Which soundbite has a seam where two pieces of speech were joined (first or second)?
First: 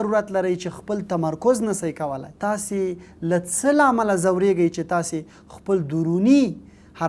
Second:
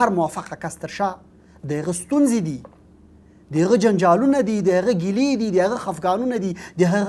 first